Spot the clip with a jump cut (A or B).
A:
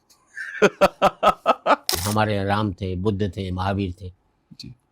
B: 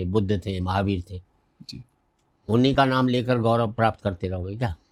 A